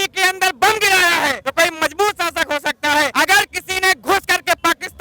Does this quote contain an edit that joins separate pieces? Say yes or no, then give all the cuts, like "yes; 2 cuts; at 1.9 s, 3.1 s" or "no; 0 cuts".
yes; 2 cuts; at 1.4 s, 3.1 s